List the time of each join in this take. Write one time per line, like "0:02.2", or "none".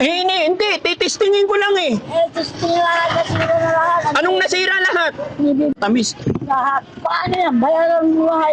0:05.8